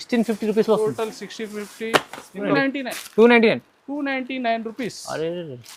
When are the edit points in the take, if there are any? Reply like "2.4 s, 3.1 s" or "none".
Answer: 2.5 s